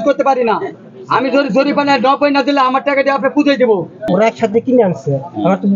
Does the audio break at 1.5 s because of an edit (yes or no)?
no